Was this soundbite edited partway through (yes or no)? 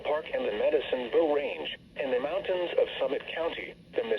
yes